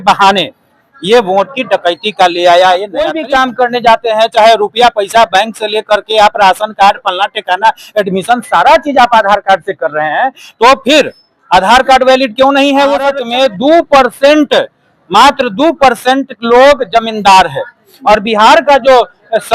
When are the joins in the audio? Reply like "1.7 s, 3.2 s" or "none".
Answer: 3.1 s, 13.2 s